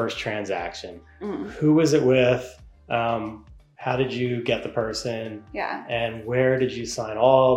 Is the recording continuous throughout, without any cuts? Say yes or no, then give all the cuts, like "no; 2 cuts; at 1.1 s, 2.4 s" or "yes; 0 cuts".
yes; 0 cuts